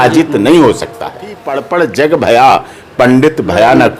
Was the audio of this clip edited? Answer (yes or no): yes